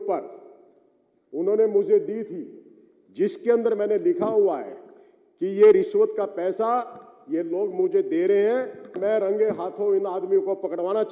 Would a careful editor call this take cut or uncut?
cut